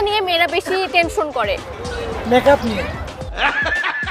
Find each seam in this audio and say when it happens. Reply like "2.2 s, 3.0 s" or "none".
none